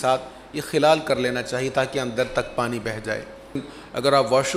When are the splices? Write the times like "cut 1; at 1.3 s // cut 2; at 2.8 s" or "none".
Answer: cut 1; at 3.7 s

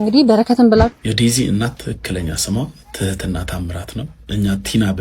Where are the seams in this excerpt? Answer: cut 1; at 1.0 s

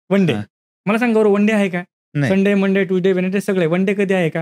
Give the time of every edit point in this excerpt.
none

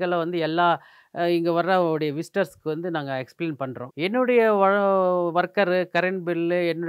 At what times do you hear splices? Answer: cut 1; at 3.8 s

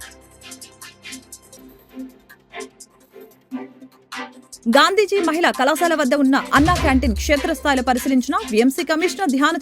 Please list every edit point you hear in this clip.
cut 1; at 1.5 s // cut 2; at 4.5 s

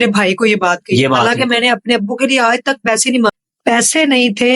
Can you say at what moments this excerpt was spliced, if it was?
cut 1; at 3.3 s

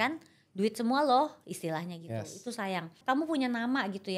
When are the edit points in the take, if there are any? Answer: cut 1; at 3.0 s

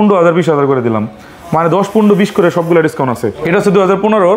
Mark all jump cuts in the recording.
cut 1; at 3.4 s

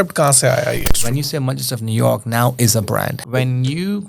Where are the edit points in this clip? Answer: cut 1; at 0.9 s // cut 2; at 3.2 s

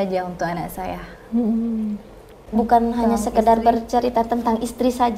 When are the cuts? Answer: cut 1; at 2.4 s

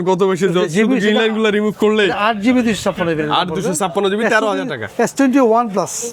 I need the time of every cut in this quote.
none

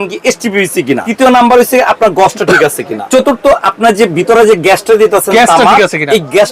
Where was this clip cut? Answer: cut 1; at 1.1 s // cut 2; at 3.0 s

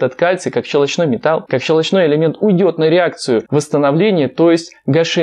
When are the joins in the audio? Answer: cut 1; at 1.4 s // cut 2; at 3.5 s

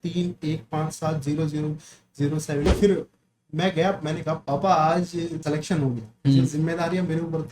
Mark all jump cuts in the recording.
cut 1; at 2.7 s // cut 2; at 4.4 s // cut 3; at 5.4 s

